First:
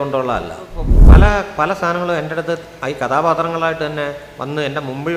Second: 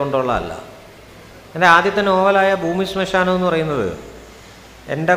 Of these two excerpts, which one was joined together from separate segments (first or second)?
first